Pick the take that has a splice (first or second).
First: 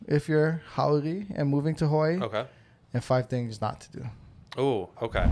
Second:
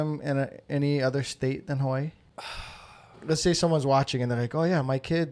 second